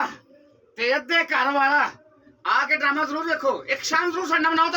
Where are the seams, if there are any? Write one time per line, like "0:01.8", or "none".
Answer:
none